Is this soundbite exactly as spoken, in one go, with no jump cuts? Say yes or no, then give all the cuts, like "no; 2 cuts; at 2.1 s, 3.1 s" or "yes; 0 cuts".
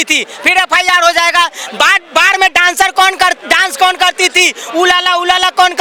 yes; 0 cuts